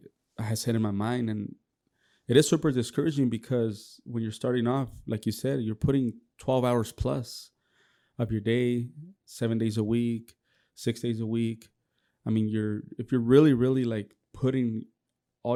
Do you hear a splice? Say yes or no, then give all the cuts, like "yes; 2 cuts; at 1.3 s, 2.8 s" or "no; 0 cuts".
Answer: no; 0 cuts